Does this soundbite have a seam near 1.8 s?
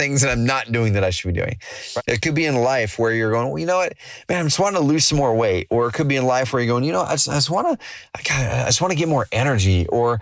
yes; 1 cut; at 1.8 s

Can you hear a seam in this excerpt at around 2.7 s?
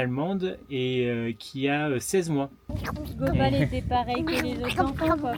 yes; 1 cut; at 2.7 s

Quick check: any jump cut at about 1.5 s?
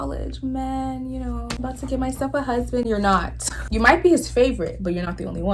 yes; 2 cuts; at 1.5 s, 3.6 s

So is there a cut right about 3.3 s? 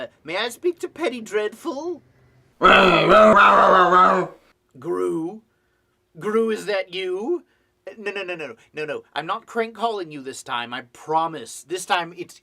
yes; 1 cut; at 3.3 s

